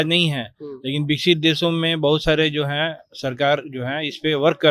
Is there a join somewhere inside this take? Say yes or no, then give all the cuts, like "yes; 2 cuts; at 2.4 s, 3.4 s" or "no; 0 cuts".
no; 0 cuts